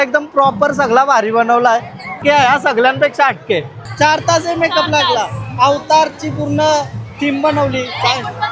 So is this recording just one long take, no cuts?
no; 2 cuts; at 2.1 s, 3.8 s

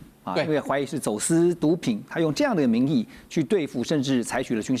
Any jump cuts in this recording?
no; 0 cuts

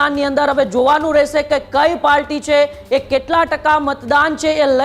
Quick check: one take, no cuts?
yes; 0 cuts

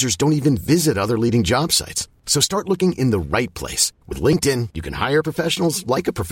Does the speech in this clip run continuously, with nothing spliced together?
yes; 0 cuts

